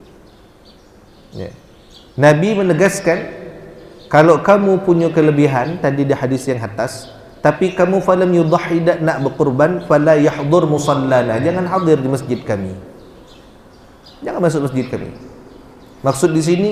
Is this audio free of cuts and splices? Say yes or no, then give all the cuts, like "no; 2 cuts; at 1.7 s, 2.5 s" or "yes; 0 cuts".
yes; 0 cuts